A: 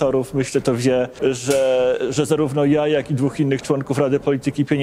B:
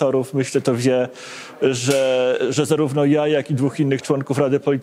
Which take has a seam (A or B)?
A